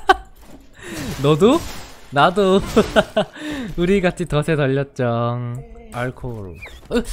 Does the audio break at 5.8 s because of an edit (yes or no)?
yes